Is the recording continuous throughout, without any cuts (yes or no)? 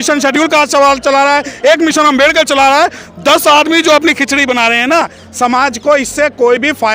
yes